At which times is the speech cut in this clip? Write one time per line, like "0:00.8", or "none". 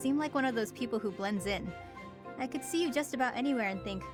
none

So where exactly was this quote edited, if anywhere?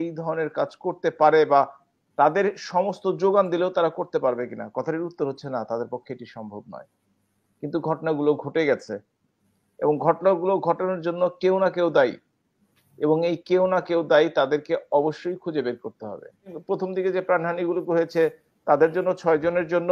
0:16.6

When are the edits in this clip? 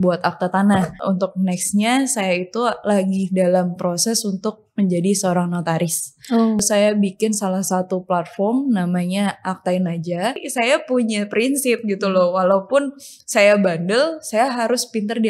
0:01.0
0:06.6
0:10.5

